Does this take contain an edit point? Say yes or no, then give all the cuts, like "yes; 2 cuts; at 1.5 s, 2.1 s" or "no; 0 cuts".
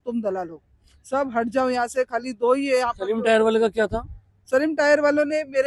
no; 0 cuts